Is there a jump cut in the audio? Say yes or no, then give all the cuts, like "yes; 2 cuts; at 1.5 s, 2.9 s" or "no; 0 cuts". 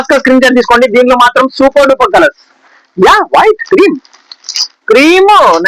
no; 0 cuts